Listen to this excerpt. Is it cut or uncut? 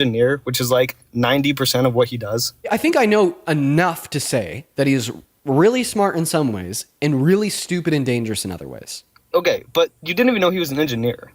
cut